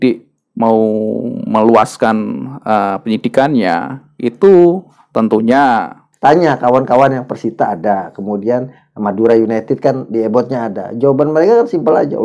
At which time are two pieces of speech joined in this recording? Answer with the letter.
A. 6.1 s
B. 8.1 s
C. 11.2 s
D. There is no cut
A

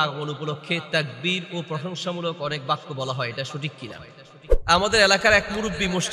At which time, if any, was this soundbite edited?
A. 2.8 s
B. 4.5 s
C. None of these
B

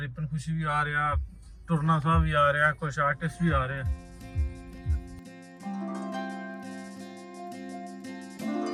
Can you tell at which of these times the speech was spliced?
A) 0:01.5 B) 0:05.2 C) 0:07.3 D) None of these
D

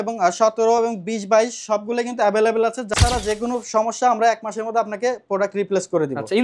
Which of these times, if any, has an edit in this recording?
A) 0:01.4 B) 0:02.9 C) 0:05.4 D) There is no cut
B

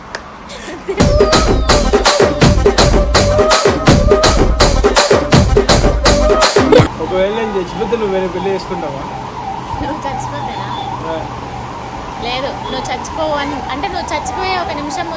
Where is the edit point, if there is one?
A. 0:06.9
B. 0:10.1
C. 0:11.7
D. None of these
A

